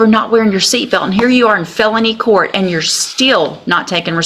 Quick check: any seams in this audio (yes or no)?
no